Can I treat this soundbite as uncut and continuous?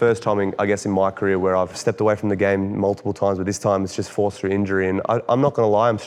yes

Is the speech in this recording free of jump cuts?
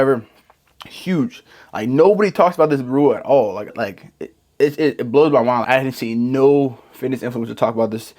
no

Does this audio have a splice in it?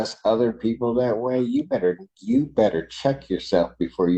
no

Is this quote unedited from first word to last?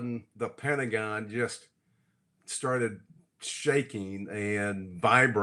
yes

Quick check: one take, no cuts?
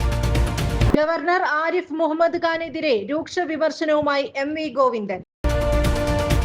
yes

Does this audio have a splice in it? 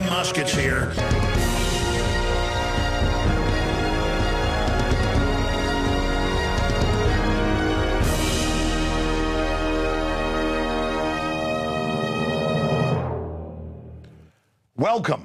no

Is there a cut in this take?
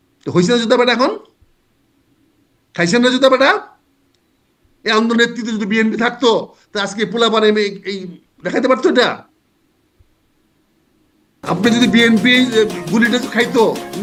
no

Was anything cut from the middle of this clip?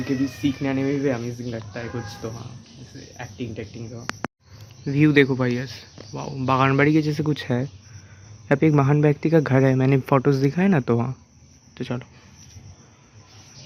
no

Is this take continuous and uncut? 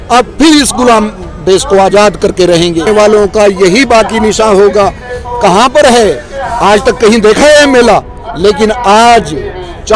no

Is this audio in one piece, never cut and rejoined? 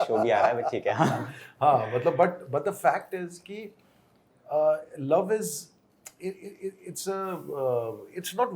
yes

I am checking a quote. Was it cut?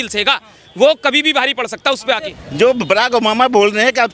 yes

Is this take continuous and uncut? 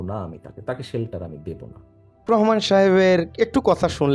no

